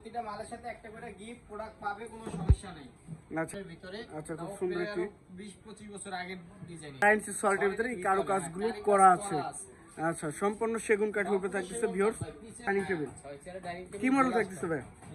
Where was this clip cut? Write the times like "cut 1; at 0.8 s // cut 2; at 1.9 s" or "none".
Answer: cut 1; at 3.5 s // cut 2; at 7.0 s // cut 3; at 12.7 s

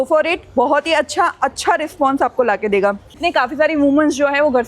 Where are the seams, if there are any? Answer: cut 1; at 3.2 s

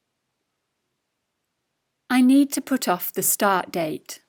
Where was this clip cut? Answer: none

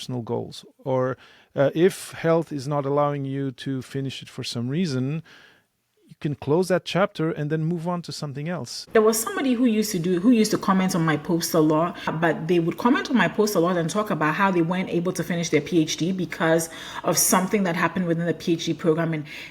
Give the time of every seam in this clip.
cut 1; at 8.9 s // cut 2; at 12.1 s

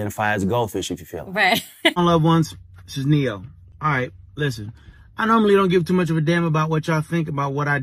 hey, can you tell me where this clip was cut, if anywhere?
cut 1; at 1.9 s

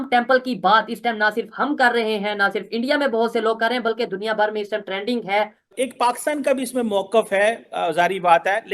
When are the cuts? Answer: cut 1; at 5.7 s

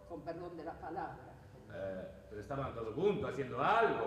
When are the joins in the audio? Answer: cut 1; at 2.5 s

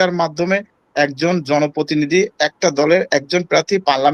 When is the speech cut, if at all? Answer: none

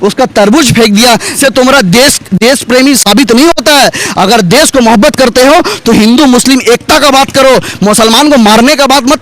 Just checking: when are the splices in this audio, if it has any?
cut 1; at 1.4 s

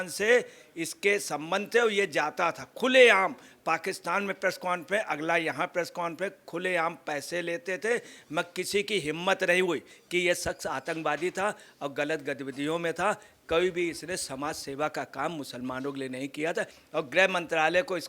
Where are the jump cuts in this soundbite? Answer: cut 1; at 10.0 s // cut 2; at 16.8 s

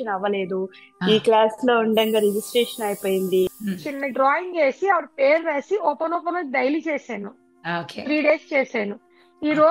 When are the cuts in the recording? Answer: cut 1; at 3.6 s

